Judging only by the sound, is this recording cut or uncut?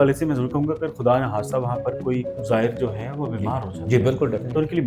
cut